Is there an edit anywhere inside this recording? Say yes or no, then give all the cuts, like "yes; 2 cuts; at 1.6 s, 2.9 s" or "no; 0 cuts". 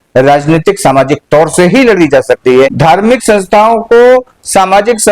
yes; 1 cut; at 2.7 s